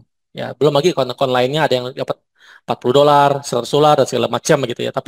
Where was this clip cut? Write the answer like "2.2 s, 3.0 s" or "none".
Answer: none